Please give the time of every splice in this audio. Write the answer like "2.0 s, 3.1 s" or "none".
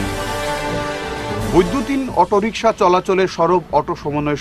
1.2 s